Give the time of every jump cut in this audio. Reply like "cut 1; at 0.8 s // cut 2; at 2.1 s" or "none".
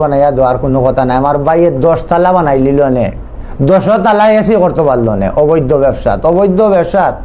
none